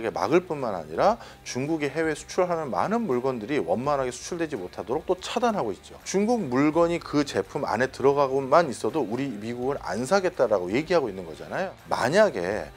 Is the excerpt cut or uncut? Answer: cut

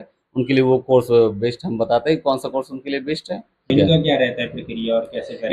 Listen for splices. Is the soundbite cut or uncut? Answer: cut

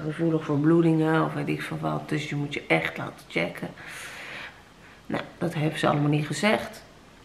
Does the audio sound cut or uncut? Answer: uncut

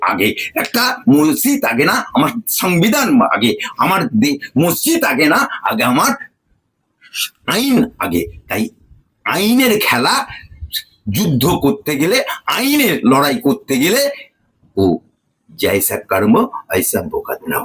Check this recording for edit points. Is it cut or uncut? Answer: uncut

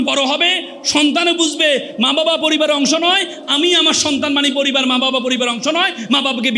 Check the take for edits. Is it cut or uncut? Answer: uncut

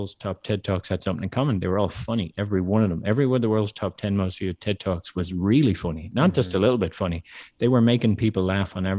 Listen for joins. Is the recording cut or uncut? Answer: uncut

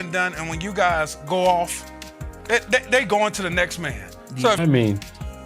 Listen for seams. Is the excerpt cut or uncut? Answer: cut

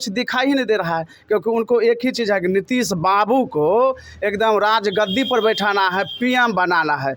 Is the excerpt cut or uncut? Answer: uncut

